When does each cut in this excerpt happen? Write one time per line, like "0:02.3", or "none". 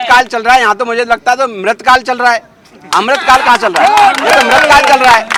none